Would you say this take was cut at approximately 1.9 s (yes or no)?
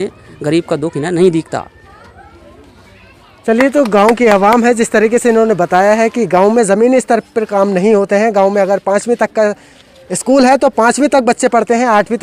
no